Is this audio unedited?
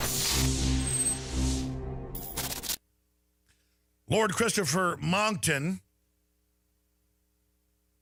yes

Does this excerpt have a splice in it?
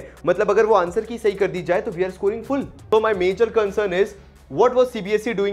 yes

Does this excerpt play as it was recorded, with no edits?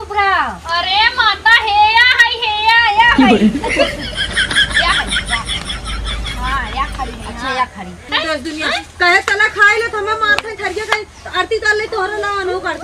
no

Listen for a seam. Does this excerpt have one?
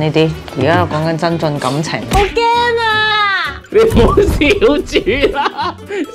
yes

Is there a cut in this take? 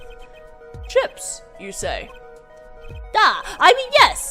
yes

